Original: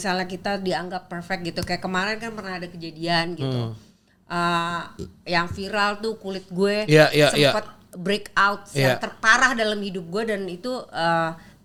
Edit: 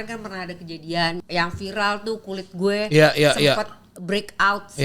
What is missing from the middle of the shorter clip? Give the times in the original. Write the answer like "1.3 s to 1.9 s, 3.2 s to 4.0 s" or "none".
3.3 s to 5.2 s